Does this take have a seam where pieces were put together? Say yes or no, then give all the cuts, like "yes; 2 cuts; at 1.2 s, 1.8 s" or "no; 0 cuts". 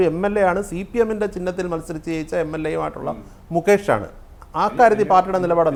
no; 0 cuts